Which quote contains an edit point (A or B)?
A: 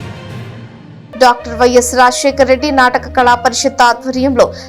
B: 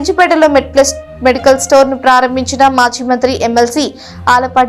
A